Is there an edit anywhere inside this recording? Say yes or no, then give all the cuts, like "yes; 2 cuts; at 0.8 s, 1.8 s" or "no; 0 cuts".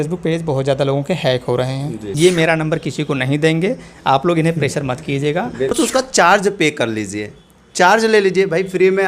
yes; 2 cuts; at 2.1 s, 5.7 s